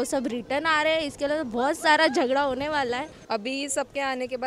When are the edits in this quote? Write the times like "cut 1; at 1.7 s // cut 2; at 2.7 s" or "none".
cut 1; at 3.1 s